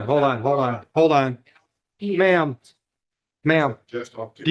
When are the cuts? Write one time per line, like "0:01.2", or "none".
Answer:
none